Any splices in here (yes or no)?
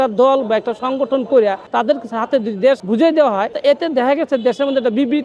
yes